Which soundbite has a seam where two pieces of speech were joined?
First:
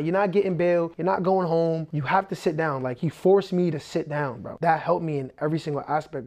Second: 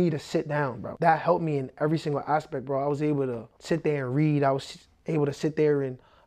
first; 2 cuts; at 0.9 s, 1.9 s

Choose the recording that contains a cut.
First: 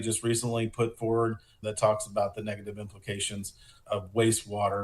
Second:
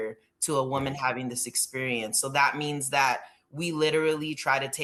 first; 2 cuts; at 1.6 s, 3.8 s

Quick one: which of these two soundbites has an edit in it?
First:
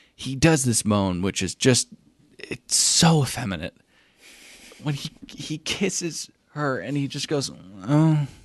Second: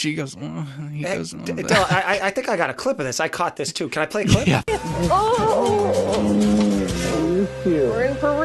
second; 1 cut; at 4.6 s

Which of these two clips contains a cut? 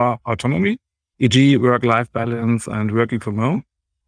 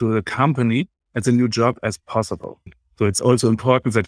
second; 1 cut; at 2.6 s

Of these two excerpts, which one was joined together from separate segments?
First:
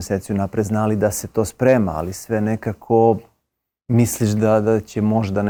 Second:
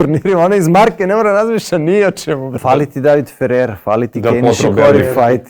second; 1 cut; at 2.5 s

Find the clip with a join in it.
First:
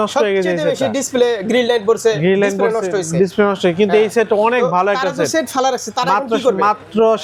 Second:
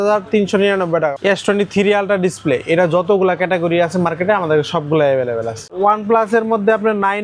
second; 2 cuts; at 1.2 s, 5.7 s

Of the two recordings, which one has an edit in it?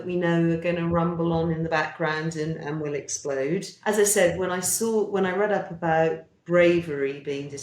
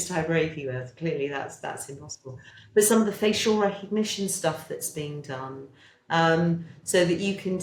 first; 1 cut; at 3.7 s

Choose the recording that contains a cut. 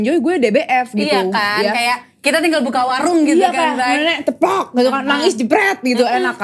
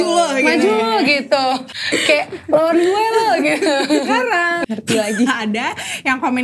second; 2 cuts; at 1.7 s, 4.6 s

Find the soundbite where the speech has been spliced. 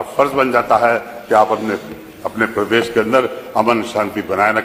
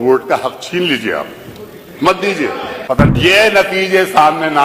second; 1 cut; at 2.8 s

